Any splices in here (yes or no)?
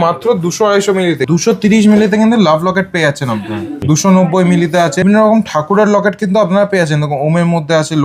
yes